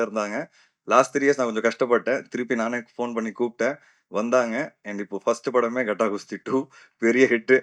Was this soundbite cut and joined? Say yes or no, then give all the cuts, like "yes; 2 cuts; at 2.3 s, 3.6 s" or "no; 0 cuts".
no; 0 cuts